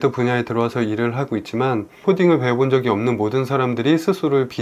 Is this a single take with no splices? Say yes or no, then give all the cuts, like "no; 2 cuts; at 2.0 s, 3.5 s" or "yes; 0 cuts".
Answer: no; 1 cut; at 2.0 s